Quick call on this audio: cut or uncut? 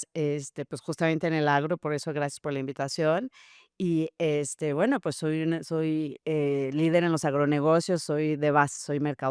uncut